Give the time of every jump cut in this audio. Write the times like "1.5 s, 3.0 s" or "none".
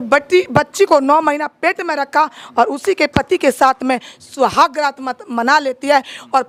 none

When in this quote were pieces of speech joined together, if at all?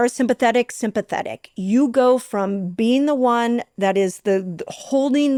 none

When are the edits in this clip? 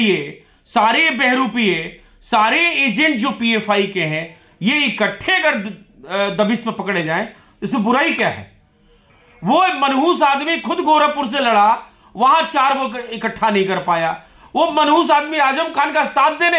9.0 s

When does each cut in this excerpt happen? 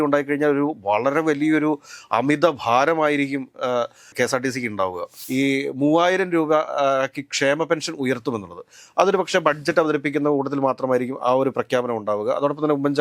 4.1 s, 5.1 s

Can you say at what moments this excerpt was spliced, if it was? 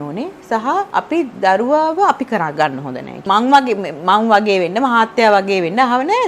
0.9 s, 3.1 s

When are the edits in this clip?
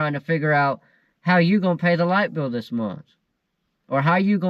none

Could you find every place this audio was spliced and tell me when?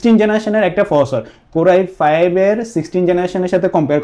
none

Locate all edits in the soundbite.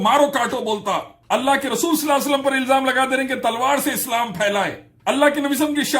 1.1 s, 4.8 s

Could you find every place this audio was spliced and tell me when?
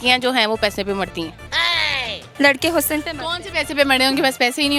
2.2 s

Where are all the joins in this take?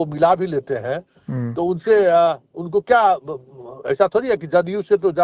none

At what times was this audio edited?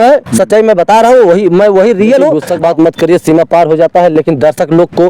2.4 s

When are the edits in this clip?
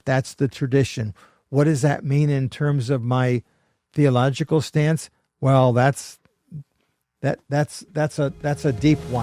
none

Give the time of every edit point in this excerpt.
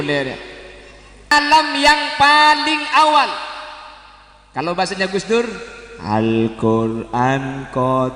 1.3 s

